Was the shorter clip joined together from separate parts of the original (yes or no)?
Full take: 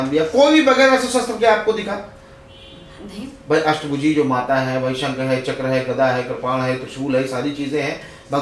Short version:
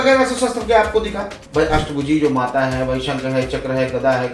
yes